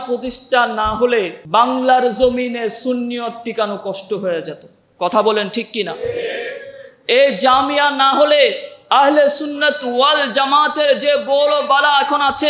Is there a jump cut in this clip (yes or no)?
yes